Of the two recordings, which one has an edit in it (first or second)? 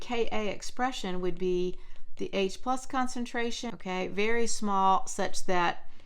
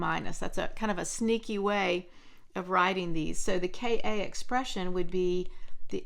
first